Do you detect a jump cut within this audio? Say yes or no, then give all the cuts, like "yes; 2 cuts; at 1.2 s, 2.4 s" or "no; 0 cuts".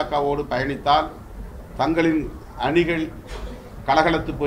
no; 0 cuts